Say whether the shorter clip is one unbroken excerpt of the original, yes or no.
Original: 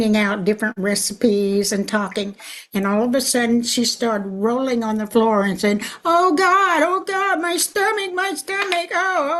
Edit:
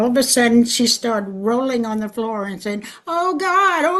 yes